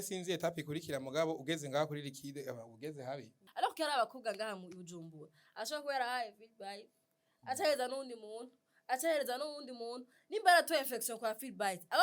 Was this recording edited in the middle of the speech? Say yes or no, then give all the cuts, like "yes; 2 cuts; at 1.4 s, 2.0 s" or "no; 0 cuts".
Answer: yes; 1 cut; at 3.4 s